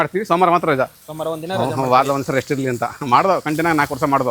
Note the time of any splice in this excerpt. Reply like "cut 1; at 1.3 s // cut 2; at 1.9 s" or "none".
none